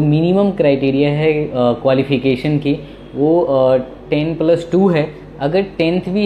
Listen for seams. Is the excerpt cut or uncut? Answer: uncut